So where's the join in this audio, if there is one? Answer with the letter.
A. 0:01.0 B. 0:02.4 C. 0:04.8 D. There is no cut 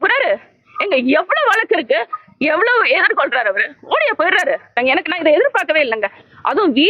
C